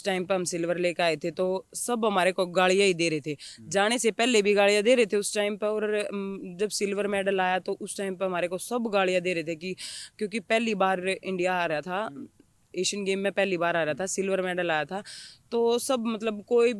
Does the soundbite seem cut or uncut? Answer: uncut